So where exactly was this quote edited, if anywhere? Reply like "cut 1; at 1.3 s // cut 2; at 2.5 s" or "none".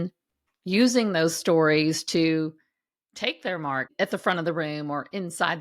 cut 1; at 3.9 s